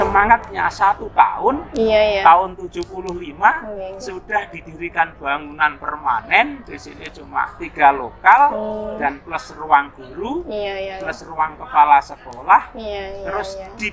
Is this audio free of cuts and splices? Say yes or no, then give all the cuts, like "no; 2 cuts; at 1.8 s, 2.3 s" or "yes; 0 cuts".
yes; 0 cuts